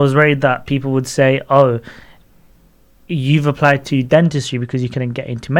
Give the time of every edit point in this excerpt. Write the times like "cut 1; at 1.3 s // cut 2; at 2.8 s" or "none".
none